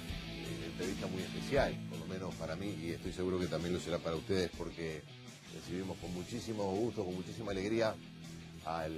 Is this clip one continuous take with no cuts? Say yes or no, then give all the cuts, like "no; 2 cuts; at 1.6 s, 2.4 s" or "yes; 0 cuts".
yes; 0 cuts